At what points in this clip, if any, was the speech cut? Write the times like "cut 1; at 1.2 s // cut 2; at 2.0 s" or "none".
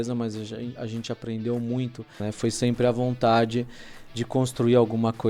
cut 1; at 2.2 s